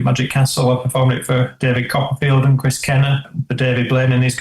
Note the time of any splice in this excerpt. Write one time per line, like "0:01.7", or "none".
0:03.4